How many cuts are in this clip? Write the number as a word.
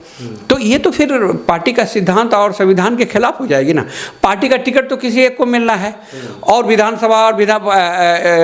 zero